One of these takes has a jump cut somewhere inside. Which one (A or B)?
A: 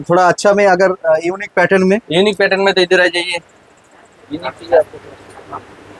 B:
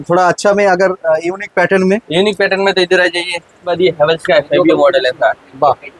B